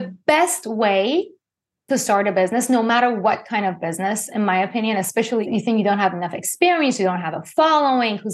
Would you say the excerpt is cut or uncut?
cut